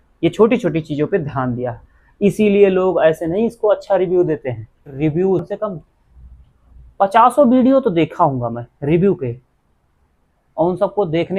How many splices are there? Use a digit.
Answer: 1